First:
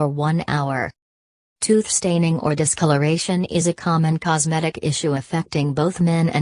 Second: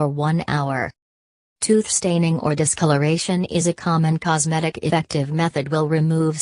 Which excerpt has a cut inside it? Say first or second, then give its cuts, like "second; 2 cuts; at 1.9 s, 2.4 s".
first; 1 cut; at 4.9 s